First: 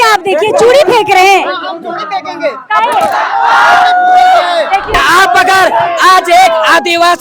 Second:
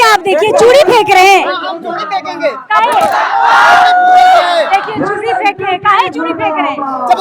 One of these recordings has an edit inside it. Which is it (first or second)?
first